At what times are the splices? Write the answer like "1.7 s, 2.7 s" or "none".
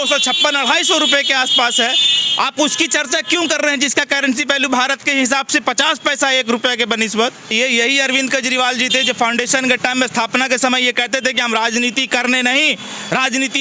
7.5 s